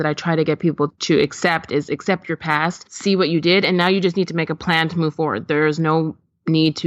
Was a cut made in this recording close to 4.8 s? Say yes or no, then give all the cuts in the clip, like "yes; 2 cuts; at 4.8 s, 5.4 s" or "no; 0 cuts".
no; 2 cuts; at 1.0 s, 2.9 s